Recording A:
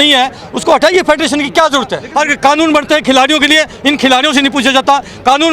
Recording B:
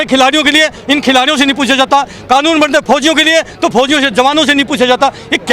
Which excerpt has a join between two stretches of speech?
A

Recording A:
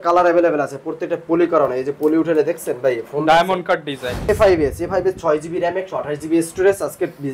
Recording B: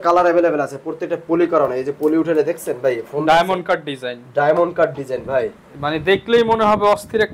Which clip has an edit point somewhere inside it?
A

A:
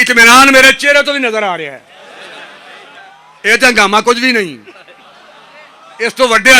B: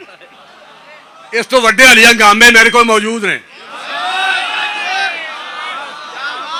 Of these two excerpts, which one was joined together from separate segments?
A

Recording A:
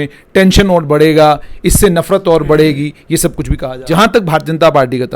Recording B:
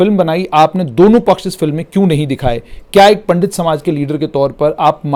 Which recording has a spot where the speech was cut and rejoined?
A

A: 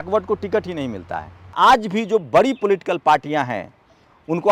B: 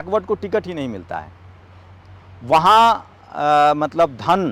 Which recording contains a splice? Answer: A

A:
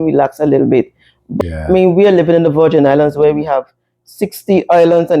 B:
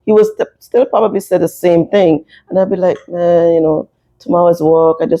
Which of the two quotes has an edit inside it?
A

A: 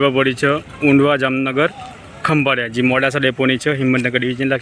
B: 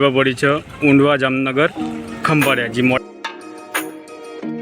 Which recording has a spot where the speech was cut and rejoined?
B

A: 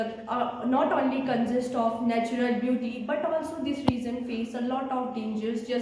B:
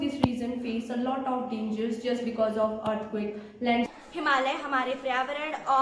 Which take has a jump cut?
B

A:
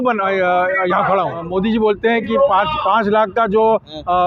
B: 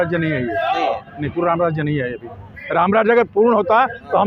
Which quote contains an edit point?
A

